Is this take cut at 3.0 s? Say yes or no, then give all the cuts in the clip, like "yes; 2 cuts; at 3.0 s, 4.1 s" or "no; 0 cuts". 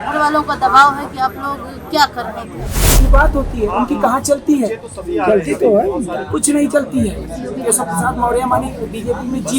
yes; 1 cut; at 3.0 s